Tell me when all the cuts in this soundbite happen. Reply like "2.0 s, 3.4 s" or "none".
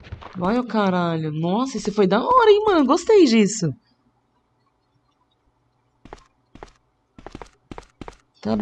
none